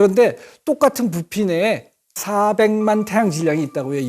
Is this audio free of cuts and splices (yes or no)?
no